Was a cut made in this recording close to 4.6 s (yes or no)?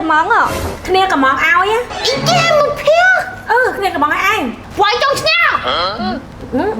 yes